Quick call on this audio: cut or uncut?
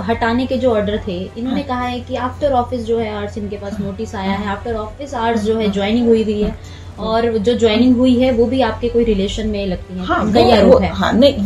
uncut